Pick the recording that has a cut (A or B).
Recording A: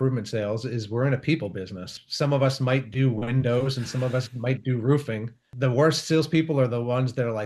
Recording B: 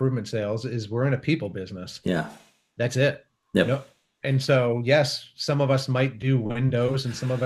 A